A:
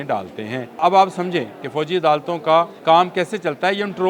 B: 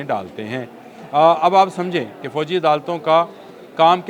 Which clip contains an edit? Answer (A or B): A